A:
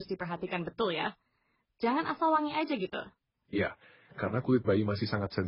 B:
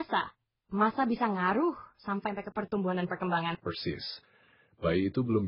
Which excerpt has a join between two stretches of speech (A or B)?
B